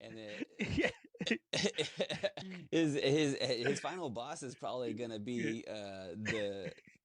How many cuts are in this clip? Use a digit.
1